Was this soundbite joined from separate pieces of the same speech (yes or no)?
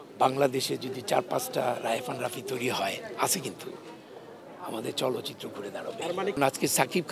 no